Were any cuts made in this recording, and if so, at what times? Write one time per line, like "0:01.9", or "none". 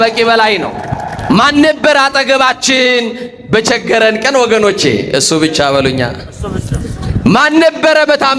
0:01.1